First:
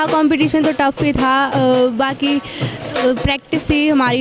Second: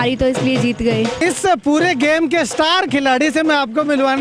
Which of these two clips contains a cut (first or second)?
second